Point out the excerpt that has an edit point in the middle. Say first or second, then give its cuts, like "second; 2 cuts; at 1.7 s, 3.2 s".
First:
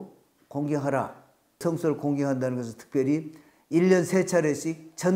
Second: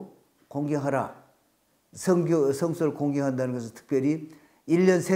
first; 1 cut; at 1.6 s